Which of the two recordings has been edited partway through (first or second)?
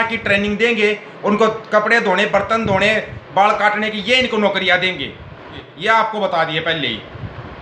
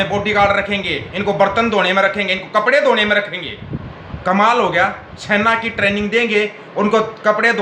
first